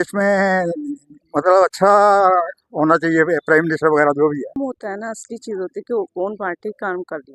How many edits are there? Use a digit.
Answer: 1